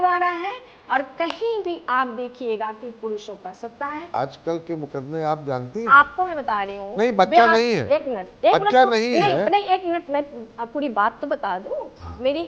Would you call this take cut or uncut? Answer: cut